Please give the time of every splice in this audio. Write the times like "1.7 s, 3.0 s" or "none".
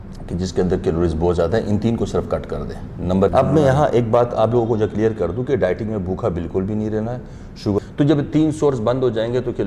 3.3 s, 7.8 s